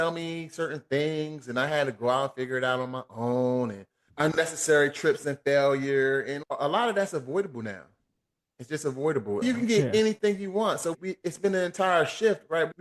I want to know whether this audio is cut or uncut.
cut